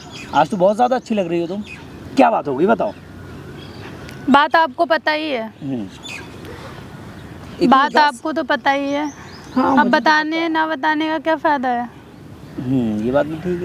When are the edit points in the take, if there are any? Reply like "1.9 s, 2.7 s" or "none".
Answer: none